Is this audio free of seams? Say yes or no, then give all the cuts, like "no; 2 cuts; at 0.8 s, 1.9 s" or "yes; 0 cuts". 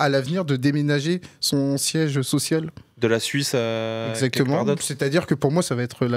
yes; 0 cuts